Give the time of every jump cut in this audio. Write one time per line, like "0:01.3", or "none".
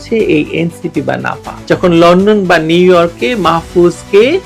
0:01.0